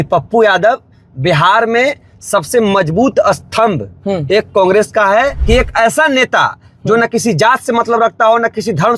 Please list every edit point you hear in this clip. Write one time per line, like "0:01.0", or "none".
0:05.4